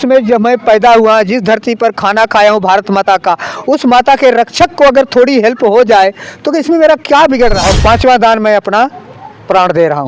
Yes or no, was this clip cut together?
yes